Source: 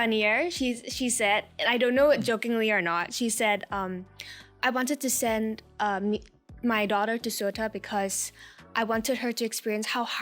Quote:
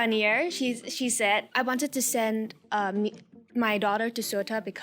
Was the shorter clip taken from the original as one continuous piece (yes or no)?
no